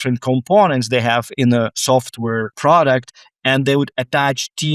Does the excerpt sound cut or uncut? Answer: cut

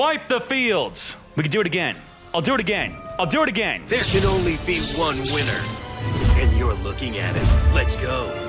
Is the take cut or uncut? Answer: cut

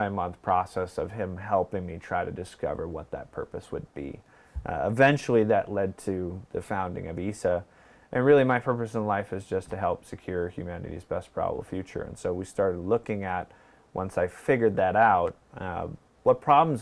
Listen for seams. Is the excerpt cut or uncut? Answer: uncut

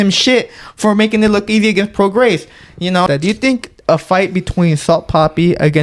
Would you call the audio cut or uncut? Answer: cut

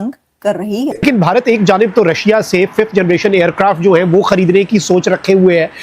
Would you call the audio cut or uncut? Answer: cut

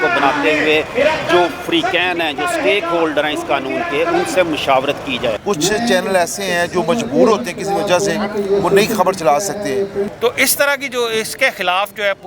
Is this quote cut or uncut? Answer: cut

